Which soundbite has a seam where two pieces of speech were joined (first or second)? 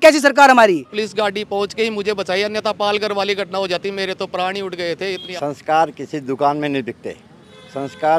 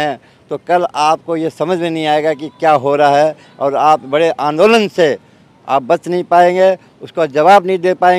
first